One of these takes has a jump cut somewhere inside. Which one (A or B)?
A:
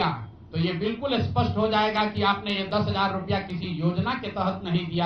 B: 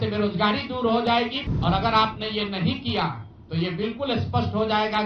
B